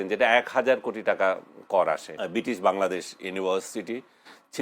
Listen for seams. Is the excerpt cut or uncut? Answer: cut